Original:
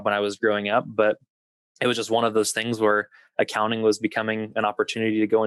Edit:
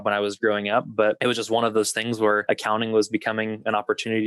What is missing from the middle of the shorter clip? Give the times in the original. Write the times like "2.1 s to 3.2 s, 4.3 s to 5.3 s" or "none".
1.2 s to 1.8 s, 3.0 s to 3.3 s